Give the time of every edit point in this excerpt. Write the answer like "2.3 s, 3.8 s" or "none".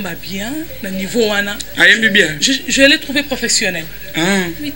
none